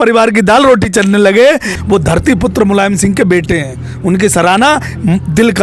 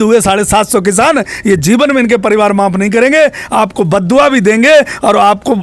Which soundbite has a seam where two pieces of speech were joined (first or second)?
first